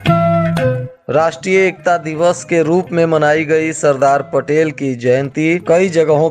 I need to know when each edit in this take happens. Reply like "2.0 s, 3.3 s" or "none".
0.9 s